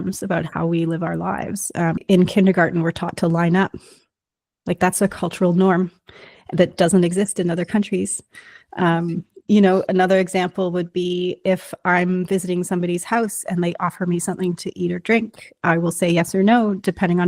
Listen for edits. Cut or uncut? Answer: cut